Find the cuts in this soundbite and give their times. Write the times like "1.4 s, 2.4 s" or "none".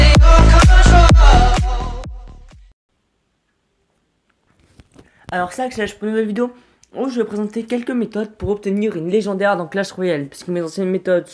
none